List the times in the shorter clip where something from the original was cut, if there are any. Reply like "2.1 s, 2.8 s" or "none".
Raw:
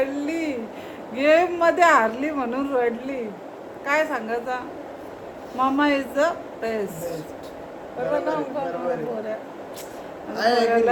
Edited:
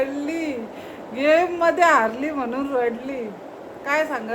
none